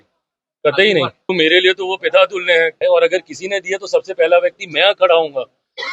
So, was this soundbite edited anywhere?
yes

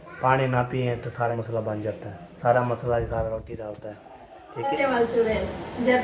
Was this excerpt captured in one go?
no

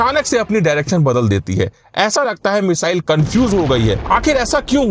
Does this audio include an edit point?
yes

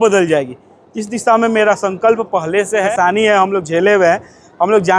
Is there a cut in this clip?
yes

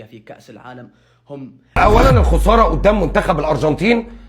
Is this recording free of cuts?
no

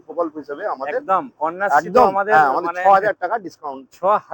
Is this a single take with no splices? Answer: yes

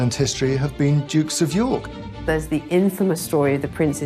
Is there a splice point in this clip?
yes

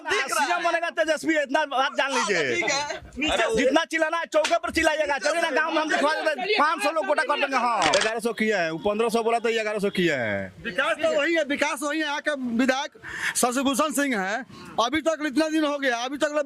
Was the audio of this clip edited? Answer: yes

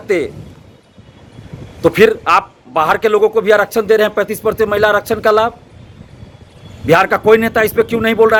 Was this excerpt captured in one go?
yes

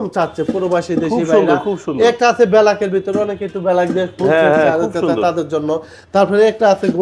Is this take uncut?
yes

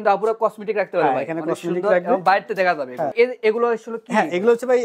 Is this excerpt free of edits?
no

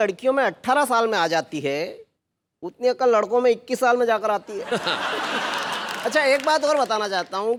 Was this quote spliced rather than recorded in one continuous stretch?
no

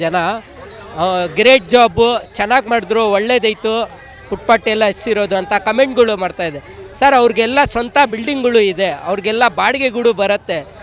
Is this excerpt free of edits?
yes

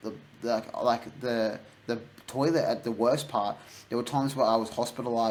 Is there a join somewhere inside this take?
no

